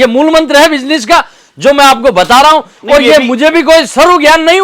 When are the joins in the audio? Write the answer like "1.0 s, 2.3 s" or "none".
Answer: none

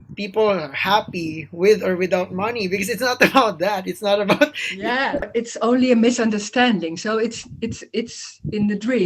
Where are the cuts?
5.3 s

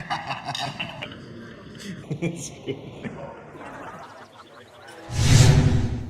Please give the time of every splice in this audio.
5.1 s

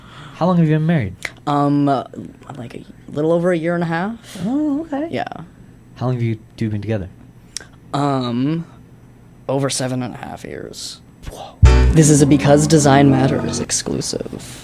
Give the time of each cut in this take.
11.7 s

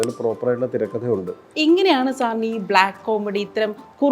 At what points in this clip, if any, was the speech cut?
1.4 s

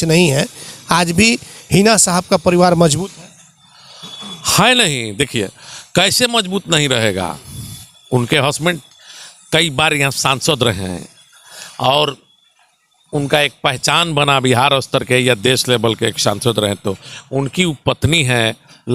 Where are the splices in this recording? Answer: none

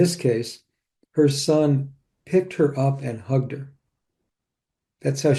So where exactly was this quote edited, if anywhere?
none

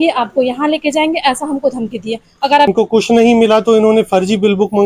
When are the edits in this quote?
2.7 s

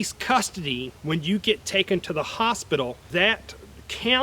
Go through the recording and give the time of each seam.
3.0 s

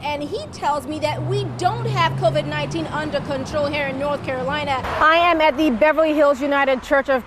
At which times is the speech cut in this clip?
4.8 s

